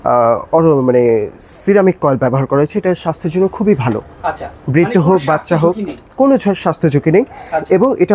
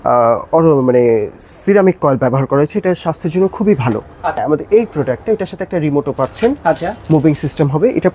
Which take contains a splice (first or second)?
second